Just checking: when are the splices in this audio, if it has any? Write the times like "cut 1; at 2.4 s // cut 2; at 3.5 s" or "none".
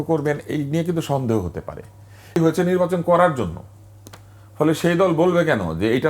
cut 1; at 2.3 s